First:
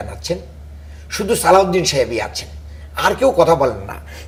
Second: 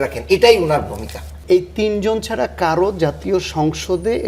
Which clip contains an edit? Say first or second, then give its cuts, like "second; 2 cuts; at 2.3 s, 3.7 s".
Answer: second; 1 cut; at 1.3 s